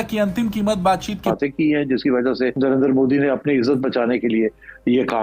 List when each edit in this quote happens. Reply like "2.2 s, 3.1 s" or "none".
1.3 s